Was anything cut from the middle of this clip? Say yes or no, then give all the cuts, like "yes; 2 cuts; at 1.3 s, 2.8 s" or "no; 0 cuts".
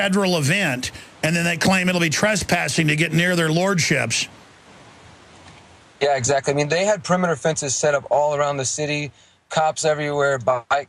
yes; 1 cut; at 5.3 s